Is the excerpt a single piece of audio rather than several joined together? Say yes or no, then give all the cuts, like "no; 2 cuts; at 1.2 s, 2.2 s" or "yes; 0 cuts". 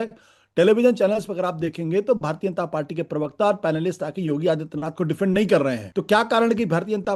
no; 1 cut; at 5.8 s